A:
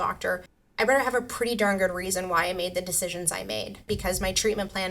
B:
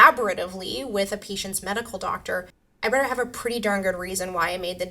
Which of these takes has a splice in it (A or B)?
A